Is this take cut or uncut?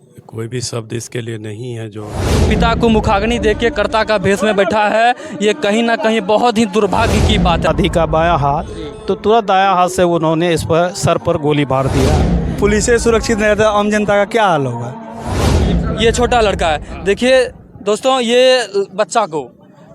cut